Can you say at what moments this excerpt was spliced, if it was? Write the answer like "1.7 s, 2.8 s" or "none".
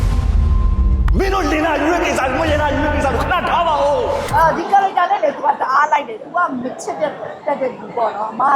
4.2 s

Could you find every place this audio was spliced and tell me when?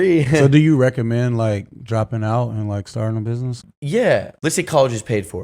3.6 s, 4.3 s

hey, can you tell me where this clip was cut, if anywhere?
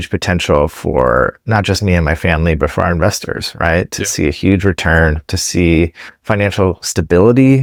none

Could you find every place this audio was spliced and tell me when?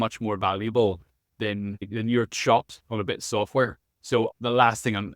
1.9 s, 4.3 s

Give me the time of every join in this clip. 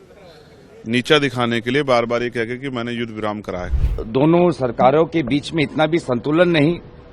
3.7 s

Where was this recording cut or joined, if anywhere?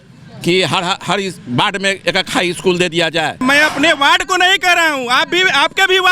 3.4 s

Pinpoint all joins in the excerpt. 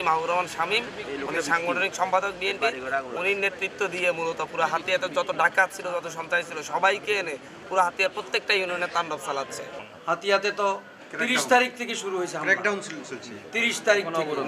9.9 s

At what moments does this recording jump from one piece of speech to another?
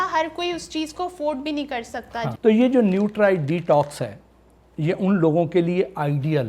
2.3 s

